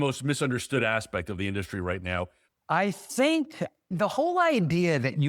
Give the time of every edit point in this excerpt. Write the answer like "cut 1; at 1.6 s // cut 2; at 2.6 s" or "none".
cut 1; at 2.4 s // cut 2; at 3.9 s